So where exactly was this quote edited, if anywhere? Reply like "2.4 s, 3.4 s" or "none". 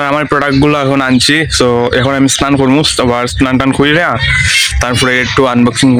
none